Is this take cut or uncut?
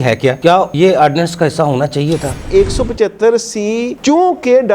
cut